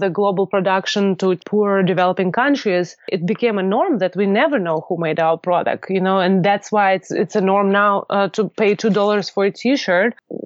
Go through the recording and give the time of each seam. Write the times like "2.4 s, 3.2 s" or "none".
1.4 s, 3.1 s